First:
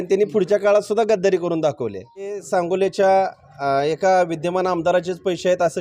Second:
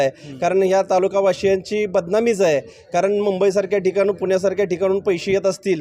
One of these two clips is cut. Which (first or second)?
first